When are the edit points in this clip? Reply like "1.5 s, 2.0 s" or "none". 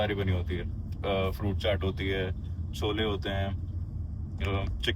none